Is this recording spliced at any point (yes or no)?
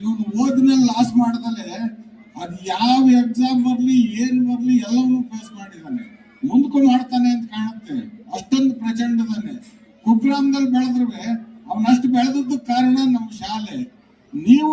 no